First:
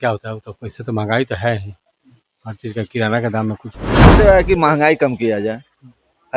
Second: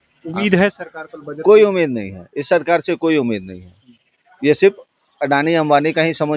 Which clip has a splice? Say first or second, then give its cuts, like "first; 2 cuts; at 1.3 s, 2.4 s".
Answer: first; 1 cut; at 4.0 s